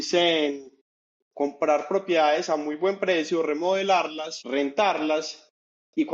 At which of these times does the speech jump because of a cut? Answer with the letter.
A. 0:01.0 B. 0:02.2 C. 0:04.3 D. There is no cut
C